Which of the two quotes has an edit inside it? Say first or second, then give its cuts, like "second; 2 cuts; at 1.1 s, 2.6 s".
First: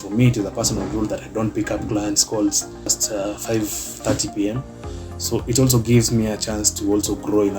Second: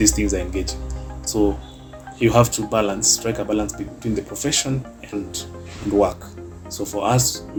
first; 1 cut; at 3.0 s